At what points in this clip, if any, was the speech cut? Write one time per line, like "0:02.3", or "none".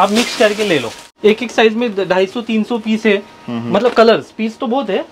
0:01.0